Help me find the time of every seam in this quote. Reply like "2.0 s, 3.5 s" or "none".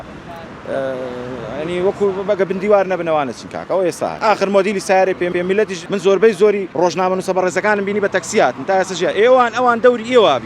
4.2 s, 5.3 s, 6.7 s